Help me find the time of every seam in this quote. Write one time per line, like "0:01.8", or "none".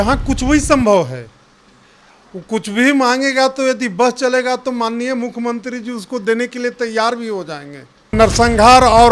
0:08.1